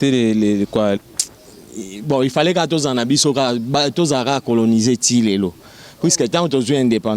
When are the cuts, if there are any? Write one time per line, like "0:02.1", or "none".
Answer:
0:01.0